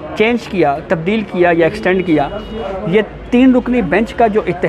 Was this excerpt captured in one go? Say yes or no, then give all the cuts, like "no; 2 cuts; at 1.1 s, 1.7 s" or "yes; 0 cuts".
no; 1 cut; at 2.5 s